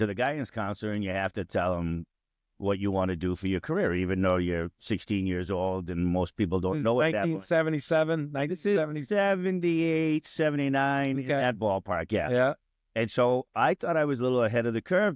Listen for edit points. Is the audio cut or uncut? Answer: uncut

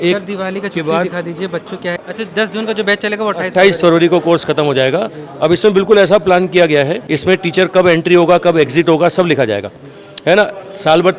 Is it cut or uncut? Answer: cut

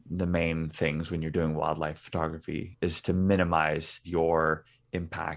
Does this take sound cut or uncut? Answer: cut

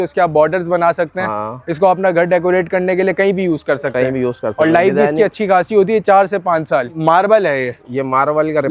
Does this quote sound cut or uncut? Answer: cut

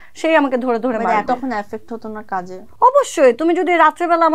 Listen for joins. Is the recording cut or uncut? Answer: cut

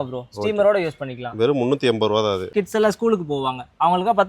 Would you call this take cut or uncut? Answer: cut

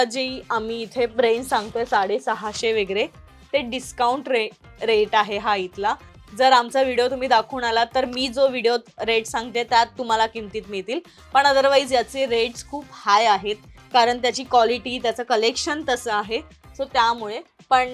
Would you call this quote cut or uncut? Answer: uncut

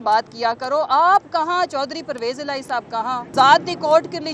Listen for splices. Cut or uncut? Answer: cut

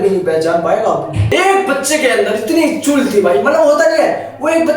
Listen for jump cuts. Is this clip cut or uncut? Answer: cut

